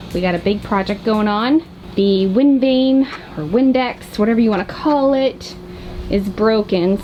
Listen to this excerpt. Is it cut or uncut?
uncut